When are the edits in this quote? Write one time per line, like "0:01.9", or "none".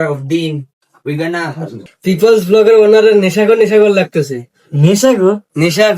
0:01.9